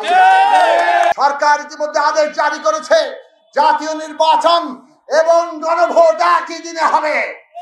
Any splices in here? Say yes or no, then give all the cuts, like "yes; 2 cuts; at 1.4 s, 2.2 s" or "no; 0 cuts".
yes; 1 cut; at 1.1 s